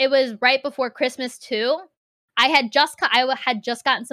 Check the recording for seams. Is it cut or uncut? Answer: cut